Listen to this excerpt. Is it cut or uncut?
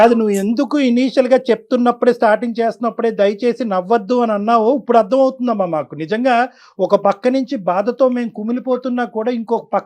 uncut